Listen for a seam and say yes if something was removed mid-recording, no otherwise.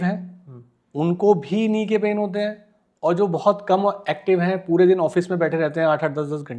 no